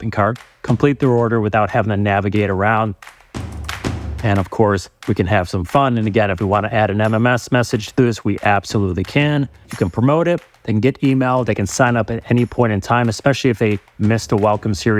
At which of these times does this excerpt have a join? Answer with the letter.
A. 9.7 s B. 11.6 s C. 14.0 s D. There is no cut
A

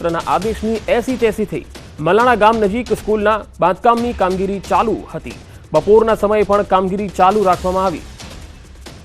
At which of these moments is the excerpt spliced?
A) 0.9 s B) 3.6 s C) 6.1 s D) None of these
B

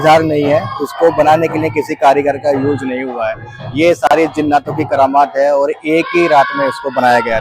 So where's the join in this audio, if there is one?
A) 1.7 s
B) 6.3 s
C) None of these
C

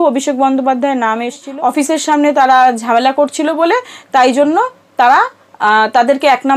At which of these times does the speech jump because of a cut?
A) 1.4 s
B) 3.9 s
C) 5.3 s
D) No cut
A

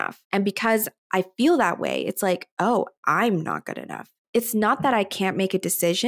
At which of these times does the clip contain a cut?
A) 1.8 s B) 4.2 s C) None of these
B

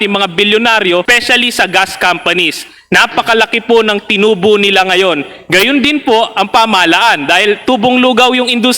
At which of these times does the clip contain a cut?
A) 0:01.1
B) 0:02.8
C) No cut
A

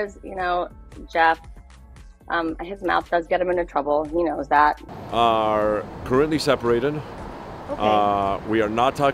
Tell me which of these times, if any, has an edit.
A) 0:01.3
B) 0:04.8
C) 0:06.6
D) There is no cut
B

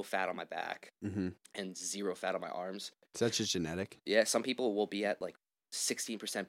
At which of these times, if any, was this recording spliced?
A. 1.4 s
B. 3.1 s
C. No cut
B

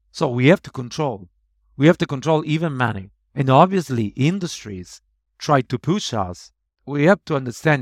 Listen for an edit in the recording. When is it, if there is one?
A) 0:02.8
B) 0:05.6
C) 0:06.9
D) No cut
C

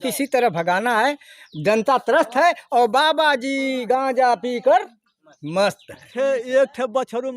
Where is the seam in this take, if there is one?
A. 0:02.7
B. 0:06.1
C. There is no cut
B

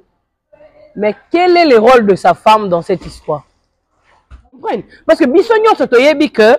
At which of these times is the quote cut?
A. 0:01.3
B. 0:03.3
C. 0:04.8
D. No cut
C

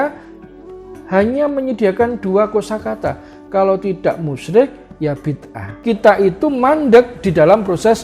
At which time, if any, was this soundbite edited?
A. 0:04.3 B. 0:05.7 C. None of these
B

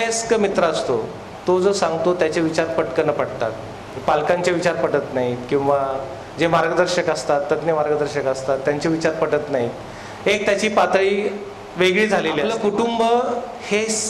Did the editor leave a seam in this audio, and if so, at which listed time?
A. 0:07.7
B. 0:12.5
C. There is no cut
B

